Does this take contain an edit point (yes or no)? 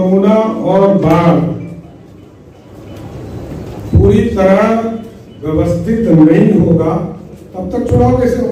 no